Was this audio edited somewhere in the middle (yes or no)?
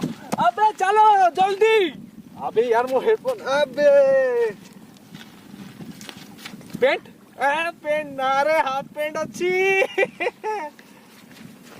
no